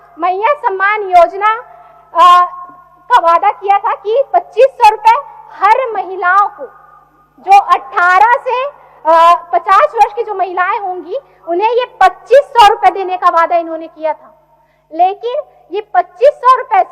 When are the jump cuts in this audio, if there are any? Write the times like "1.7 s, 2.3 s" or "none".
none